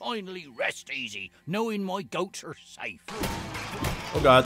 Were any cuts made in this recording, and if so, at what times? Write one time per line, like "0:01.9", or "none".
0:03.0